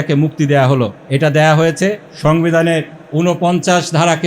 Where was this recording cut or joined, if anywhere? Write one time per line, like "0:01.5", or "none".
0:01.0
0:02.1
0:03.0